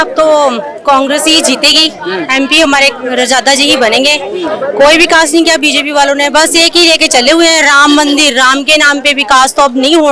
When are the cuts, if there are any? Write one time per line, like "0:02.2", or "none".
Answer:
none